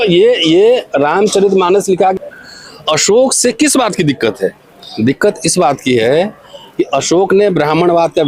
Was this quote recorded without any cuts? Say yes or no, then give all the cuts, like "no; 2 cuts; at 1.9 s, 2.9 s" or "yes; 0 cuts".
no; 1 cut; at 2.1 s